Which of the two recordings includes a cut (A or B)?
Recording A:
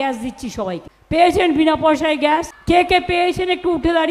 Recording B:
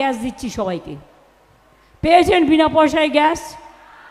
A